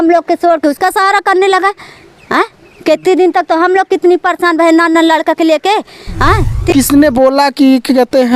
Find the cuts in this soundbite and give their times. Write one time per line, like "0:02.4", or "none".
0:06.7